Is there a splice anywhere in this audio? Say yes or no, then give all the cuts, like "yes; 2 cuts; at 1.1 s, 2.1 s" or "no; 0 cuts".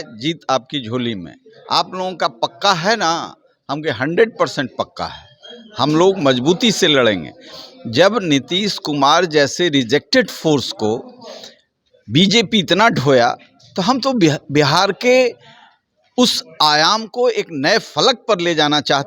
no; 0 cuts